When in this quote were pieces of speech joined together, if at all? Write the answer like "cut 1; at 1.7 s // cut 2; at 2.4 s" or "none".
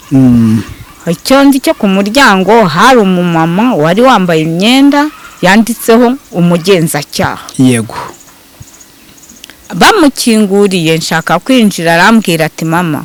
none